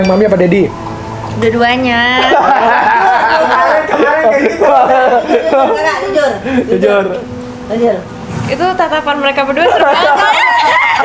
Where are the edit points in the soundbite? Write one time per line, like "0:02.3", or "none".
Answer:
none